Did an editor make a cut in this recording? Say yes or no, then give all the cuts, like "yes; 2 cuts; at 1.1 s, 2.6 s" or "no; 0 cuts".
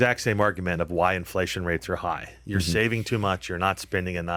no; 0 cuts